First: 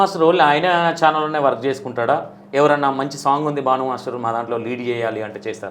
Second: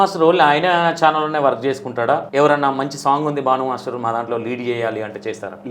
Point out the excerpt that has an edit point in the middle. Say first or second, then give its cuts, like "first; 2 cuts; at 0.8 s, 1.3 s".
second; 1 cut; at 2.3 s